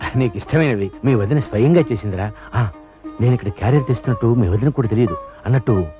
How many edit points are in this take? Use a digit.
1